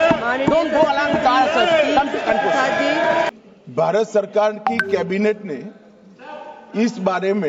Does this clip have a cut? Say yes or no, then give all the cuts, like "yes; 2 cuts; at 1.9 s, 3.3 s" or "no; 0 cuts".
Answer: yes; 1 cut; at 3.3 s